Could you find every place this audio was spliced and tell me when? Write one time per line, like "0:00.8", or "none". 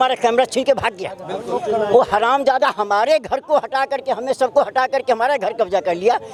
none